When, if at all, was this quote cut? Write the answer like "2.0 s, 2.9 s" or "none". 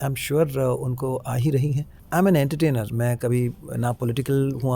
2.0 s